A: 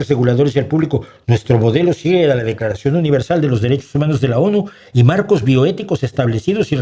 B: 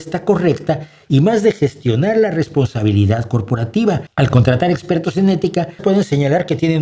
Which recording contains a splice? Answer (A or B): B